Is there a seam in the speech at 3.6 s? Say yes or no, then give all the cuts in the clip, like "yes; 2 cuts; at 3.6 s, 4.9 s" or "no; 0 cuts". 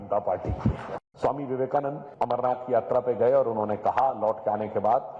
no; 2 cuts; at 1.0 s, 2.0 s